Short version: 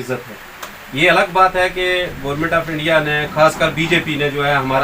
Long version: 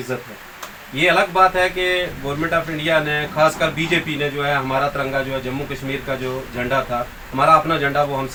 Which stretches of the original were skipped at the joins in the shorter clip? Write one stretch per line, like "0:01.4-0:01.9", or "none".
none